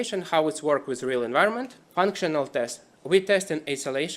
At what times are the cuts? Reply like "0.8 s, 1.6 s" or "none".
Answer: 1.8 s